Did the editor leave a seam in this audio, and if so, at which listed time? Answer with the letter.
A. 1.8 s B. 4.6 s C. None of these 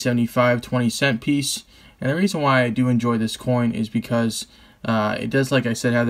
C